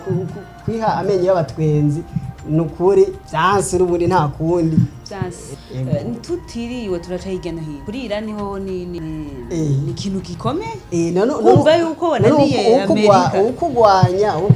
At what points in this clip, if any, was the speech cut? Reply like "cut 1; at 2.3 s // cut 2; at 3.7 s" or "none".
cut 1; at 3.2 s // cut 2; at 5.4 s // cut 3; at 7.8 s // cut 4; at 9.0 s // cut 5; at 10.3 s